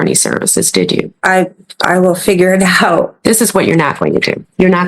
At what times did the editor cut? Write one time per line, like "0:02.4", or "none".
0:01.1
0:03.1